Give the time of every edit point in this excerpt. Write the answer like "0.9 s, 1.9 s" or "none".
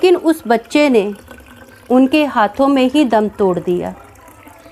none